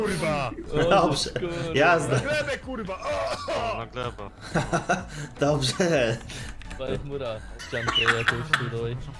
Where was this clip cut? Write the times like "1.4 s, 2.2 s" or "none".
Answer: 7.6 s